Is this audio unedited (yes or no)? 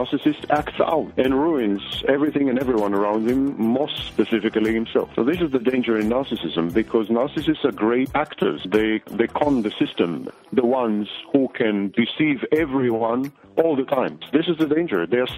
no